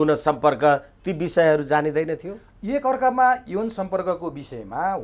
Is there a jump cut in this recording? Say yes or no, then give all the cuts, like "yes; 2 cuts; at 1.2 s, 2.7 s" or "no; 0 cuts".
no; 0 cuts